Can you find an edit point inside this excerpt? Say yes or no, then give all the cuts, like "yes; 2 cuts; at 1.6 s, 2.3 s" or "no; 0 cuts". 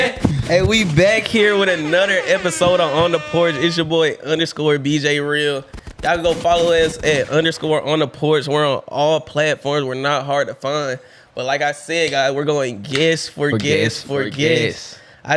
no; 0 cuts